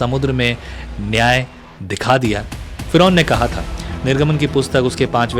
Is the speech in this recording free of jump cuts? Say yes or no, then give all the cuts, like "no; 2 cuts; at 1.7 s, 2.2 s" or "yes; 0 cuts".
no; 1 cut; at 2.7 s